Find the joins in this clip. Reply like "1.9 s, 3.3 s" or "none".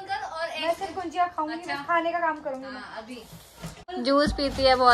3.8 s